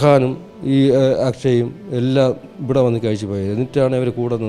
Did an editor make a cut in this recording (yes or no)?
no